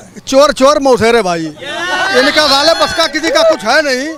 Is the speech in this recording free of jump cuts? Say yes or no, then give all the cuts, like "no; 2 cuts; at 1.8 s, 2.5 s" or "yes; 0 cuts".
yes; 0 cuts